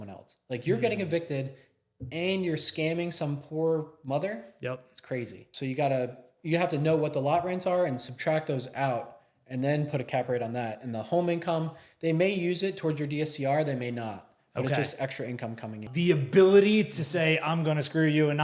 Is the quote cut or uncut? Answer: cut